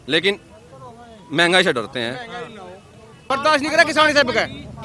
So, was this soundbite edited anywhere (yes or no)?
yes